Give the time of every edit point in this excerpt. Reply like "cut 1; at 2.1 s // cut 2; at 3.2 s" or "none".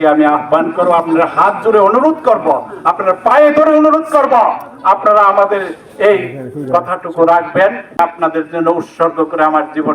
cut 1; at 8.0 s